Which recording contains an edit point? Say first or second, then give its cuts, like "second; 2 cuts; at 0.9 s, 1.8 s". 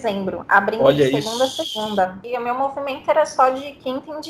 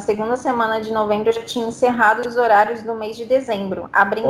first; 1 cut; at 2.2 s